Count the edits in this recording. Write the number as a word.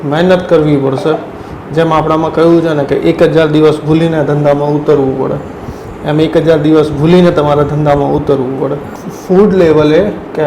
one